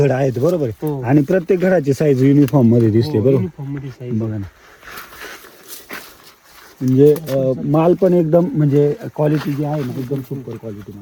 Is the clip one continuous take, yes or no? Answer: yes